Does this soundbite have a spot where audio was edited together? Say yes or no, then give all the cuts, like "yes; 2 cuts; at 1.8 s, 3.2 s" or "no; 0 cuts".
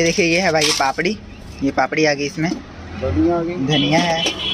no; 0 cuts